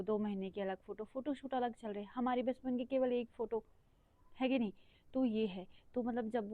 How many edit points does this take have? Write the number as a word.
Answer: zero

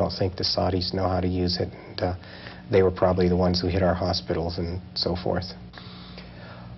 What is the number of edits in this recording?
one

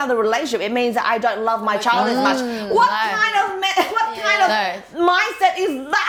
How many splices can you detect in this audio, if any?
zero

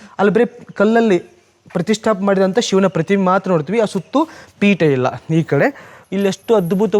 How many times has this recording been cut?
one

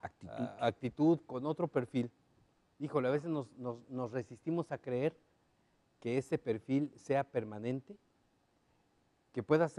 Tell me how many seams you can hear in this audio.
zero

